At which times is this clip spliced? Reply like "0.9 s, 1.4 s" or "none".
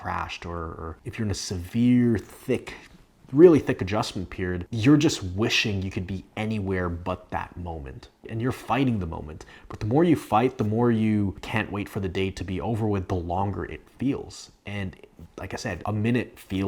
none